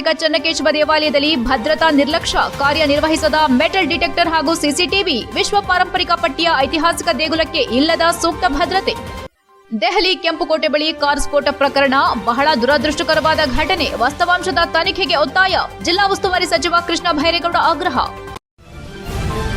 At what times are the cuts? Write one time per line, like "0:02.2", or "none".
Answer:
0:18.3

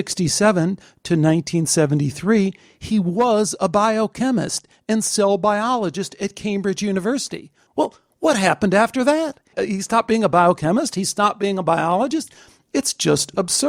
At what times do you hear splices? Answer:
none

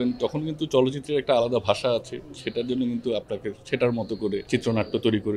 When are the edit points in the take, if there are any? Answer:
0:04.5

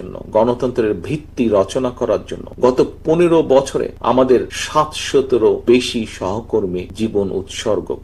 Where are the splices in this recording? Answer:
0:02.4
0:03.9
0:04.6
0:05.6
0:06.9

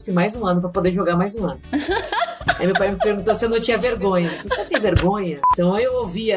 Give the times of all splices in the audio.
0:05.4

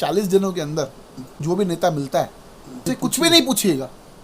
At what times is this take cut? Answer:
0:01.4
0:02.8

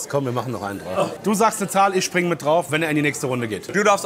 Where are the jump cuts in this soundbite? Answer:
0:01.2
0:02.7

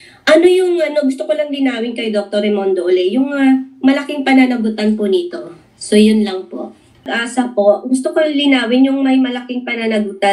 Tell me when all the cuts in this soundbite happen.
0:07.1

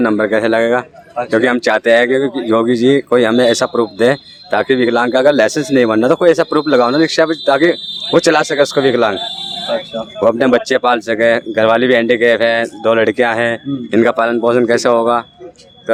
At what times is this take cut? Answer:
none

